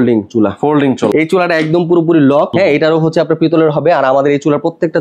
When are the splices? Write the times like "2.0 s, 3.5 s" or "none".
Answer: 1.1 s, 2.5 s